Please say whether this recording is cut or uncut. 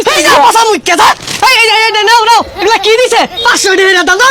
uncut